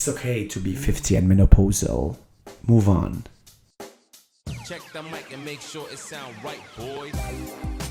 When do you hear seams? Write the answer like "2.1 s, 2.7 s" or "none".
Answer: 3.7 s